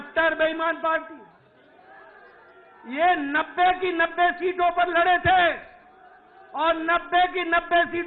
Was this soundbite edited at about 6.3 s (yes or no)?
no